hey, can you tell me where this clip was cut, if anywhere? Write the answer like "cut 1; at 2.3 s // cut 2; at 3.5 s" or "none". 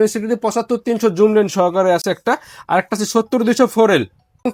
none